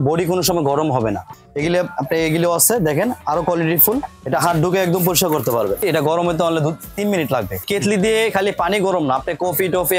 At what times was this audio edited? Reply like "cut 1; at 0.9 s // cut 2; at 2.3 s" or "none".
cut 1; at 1.3 s // cut 2; at 4.2 s // cut 3; at 5.8 s // cut 4; at 7.7 s